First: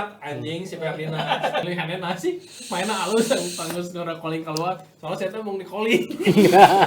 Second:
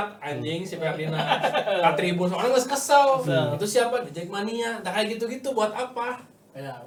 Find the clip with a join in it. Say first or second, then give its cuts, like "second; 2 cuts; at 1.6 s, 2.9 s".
first; 1 cut; at 1.6 s